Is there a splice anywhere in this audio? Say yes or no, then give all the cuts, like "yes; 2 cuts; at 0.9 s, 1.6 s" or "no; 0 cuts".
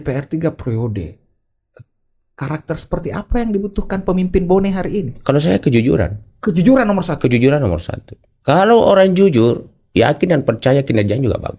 no; 0 cuts